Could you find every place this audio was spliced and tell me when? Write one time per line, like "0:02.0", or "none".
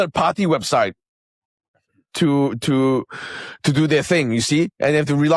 none